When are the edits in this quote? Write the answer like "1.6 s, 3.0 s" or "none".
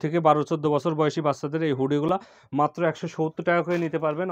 none